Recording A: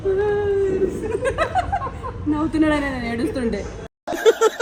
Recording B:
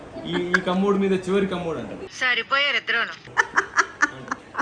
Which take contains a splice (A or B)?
B